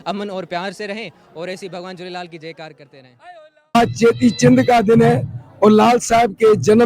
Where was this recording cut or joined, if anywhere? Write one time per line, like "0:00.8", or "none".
0:03.8